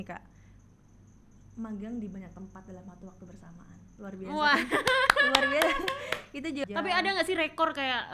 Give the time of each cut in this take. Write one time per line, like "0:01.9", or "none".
0:06.6

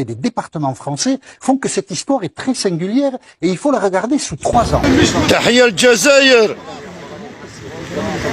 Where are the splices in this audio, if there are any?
0:04.8

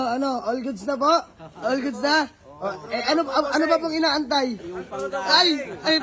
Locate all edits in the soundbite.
none

